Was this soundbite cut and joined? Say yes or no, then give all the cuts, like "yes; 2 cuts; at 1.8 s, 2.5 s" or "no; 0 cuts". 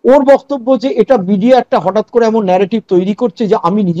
no; 0 cuts